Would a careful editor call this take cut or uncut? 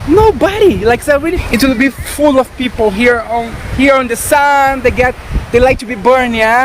cut